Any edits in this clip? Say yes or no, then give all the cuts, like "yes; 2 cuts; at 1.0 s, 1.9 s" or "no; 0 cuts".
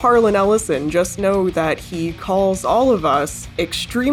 no; 0 cuts